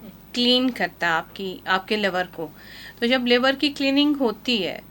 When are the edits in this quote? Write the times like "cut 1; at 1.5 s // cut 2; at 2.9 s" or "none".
none